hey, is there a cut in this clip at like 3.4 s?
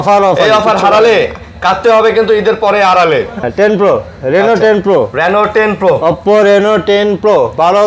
yes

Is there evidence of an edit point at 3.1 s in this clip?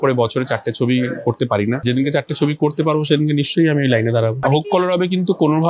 no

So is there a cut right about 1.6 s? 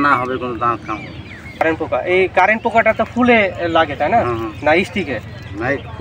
yes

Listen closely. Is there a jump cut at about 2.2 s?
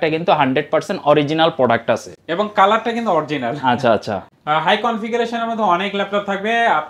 no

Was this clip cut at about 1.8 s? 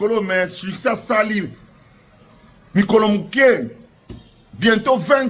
no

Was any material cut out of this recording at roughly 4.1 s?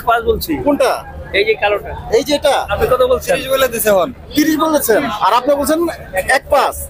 no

